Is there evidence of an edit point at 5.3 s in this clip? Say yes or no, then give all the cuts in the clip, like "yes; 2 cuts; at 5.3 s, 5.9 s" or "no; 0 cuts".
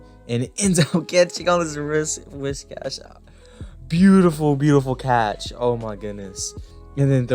no; 0 cuts